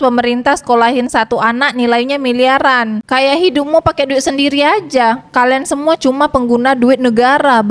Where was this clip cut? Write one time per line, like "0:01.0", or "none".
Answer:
0:03.0